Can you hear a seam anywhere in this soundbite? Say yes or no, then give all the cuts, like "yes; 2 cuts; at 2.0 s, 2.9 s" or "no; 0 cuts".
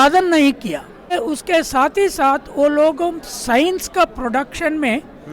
yes; 1 cut; at 1.1 s